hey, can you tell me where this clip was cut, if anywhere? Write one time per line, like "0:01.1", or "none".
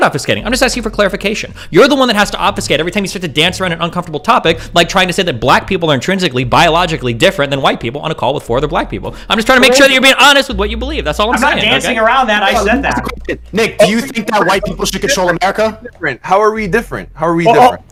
none

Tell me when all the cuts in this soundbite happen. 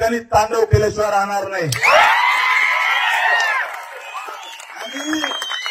none

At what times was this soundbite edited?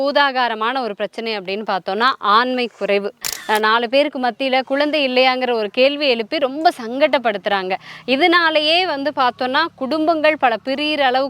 0:03.3

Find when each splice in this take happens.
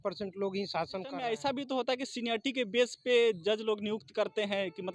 0:01.1

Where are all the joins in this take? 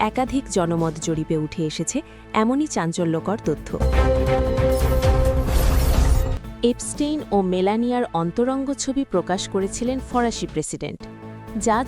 0:03.7
0:06.3

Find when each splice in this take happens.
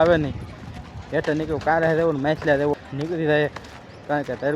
0:02.7

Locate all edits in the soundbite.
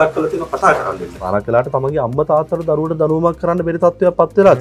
0:01.2

